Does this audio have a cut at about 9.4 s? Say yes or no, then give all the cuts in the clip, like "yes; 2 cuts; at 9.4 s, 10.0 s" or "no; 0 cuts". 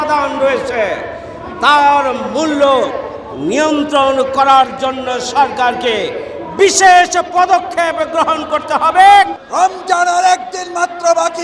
yes; 1 cut; at 9.4 s